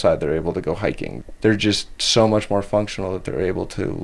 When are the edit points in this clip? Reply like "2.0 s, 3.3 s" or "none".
1.1 s

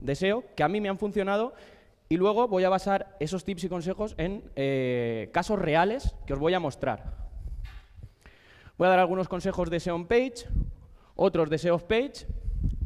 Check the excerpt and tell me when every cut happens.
none

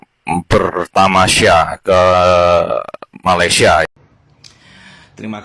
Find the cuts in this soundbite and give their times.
3.9 s

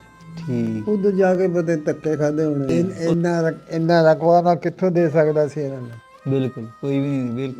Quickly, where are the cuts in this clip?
2.7 s

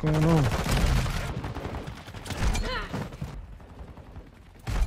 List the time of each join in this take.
1.2 s, 3.3 s

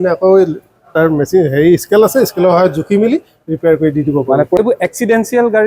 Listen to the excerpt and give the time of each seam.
4.8 s

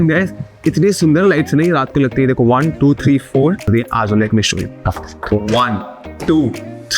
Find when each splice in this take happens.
3.7 s

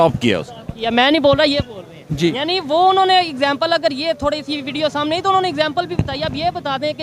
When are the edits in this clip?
none

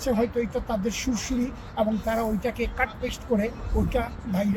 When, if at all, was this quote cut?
none

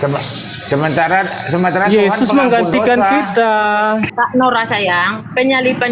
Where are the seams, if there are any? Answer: 4.1 s

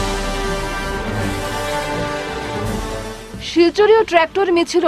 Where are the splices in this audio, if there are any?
none

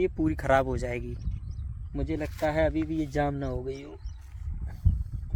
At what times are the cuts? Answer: none

